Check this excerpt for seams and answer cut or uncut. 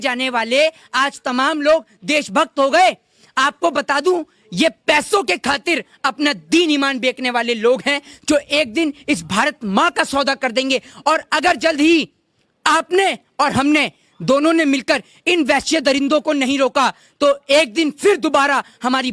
uncut